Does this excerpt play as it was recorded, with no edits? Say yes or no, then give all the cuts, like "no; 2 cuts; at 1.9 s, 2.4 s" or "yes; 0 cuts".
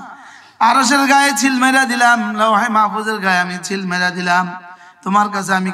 yes; 0 cuts